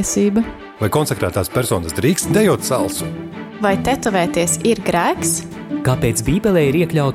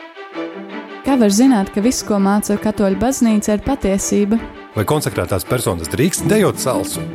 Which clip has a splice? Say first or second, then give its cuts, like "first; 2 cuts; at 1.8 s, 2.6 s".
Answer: second; 1 cut; at 1.0 s